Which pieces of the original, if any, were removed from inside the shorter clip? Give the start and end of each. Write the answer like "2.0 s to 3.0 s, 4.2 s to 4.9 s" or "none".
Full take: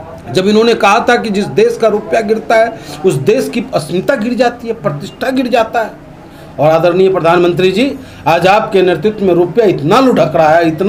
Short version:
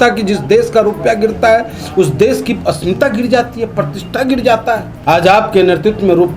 6.0 s to 8.1 s